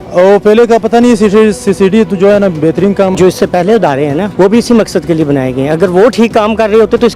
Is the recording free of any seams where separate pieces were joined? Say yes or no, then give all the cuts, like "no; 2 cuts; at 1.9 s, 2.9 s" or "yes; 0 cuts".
no; 2 cuts; at 3.1 s, 4.3 s